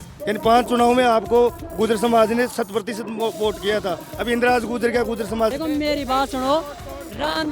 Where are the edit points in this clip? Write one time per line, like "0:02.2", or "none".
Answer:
0:05.5